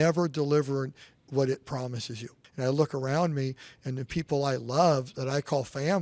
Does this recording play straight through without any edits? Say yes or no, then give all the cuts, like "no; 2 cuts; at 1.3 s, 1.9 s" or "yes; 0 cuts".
no; 1 cut; at 2.4 s